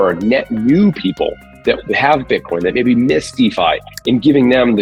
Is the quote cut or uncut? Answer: uncut